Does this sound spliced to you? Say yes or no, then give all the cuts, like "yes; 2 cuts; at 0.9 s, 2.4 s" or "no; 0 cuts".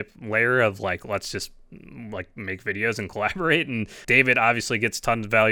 yes; 1 cut; at 4.0 s